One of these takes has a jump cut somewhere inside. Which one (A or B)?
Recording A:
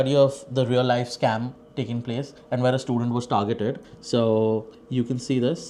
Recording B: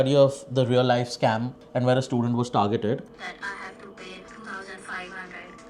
B